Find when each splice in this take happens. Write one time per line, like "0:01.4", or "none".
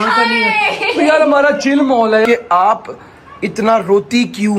0:01.3
0:02.3